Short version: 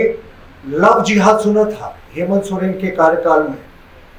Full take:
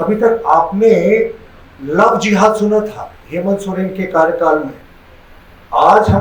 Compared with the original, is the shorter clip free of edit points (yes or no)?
yes